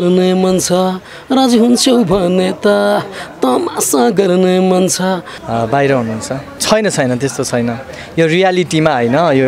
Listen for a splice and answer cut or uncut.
cut